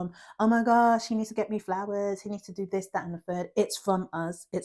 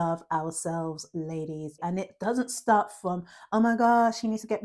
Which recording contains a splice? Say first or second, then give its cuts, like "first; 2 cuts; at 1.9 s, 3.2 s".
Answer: second; 1 cut; at 1.8 s